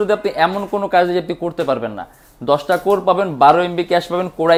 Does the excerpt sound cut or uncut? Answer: uncut